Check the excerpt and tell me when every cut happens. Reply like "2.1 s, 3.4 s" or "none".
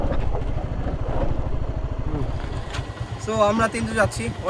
3.0 s